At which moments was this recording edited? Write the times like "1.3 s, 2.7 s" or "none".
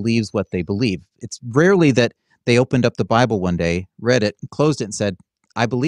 none